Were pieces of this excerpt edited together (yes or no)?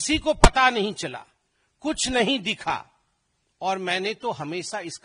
no